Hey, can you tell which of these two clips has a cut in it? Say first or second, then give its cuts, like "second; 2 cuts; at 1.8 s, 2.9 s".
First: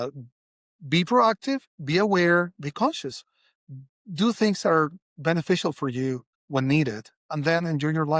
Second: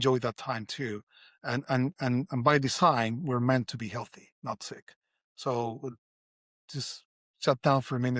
first; 1 cut; at 6.3 s